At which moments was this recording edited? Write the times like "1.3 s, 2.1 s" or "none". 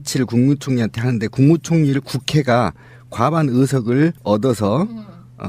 1.5 s